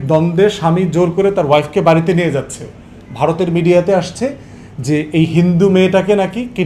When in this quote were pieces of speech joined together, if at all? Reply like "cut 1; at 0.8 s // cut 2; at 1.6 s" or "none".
none